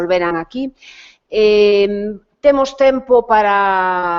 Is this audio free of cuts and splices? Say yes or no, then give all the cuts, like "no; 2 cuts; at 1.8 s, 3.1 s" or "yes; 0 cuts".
no; 1 cut; at 2.4 s